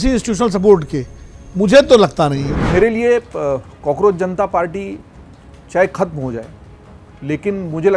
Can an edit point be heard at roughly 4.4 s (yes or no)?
no